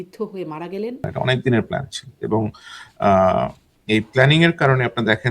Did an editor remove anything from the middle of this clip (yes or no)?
yes